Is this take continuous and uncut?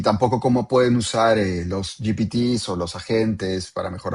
yes; 0 cuts

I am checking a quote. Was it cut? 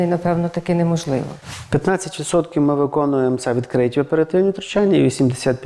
yes; 1 cut; at 1.3 s

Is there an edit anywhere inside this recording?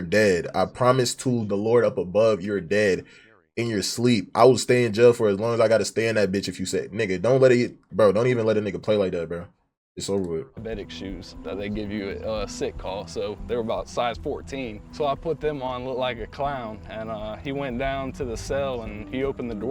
no; 0 cuts

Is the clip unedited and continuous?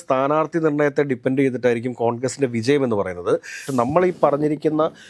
no; 1 cut; at 3.6 s

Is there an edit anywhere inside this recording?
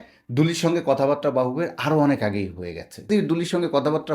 yes; 1 cut; at 3.1 s

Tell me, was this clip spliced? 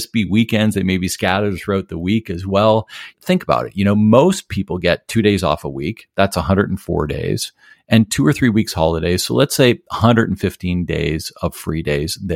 no; 0 cuts

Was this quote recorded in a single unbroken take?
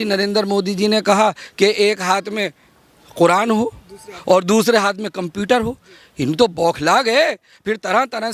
yes; 0 cuts

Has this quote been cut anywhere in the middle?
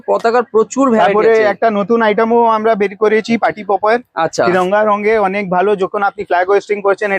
no; 0 cuts

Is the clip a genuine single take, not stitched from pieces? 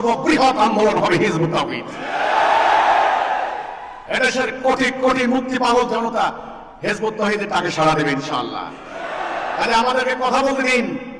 yes; 0 cuts

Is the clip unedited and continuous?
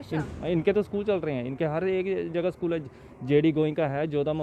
yes; 0 cuts

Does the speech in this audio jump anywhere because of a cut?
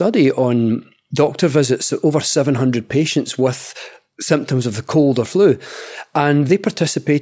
yes; 2 cuts; at 1.0 s, 6.5 s

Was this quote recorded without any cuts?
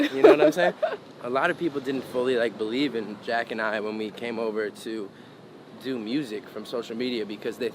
no; 1 cut; at 1.1 s

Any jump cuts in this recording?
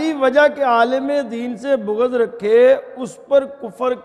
no; 0 cuts

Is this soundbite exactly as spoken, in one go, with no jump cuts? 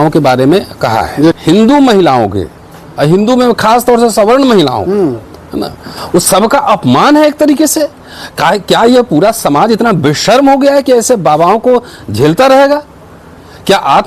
no; 1 cut; at 1.4 s

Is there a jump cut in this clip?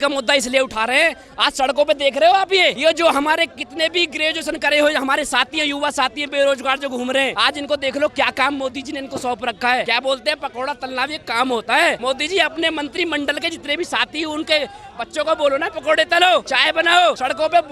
yes; 5 cuts; at 2.8 s, 7.3 s, 9.9 s, 12.0 s, 17.0 s

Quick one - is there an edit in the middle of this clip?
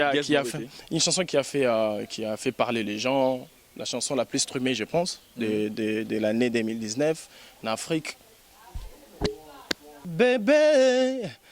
yes; 1 cut; at 9.9 s

